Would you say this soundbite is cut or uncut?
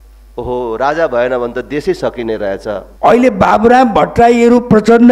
cut